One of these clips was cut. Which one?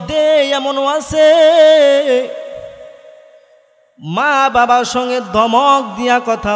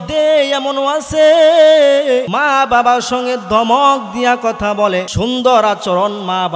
second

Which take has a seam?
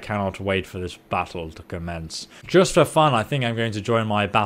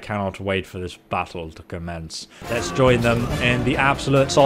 second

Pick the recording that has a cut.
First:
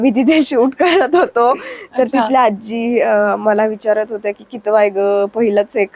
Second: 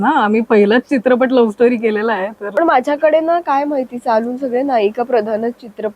second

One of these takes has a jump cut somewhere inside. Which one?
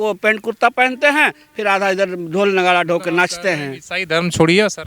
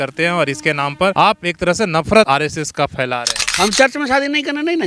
second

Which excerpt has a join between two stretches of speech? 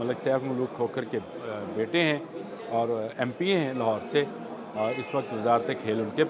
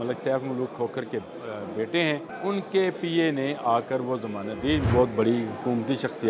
second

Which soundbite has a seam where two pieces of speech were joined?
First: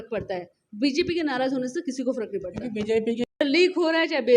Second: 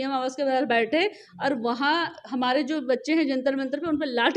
first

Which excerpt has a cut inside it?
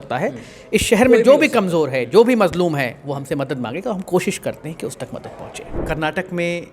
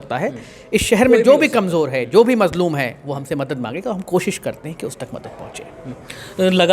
first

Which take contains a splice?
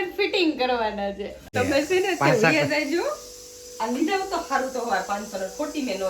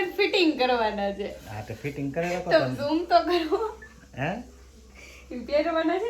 first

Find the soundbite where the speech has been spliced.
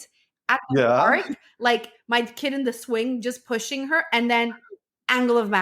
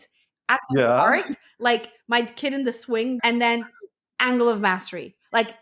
second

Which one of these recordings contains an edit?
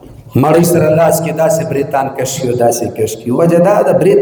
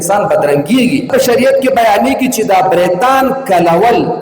second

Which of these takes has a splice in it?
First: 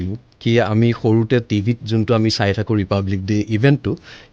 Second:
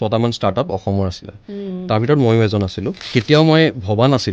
second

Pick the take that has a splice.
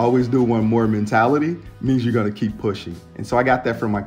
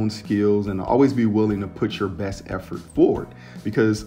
second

